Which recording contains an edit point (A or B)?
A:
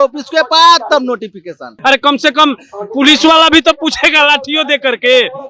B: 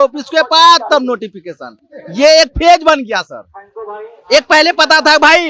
A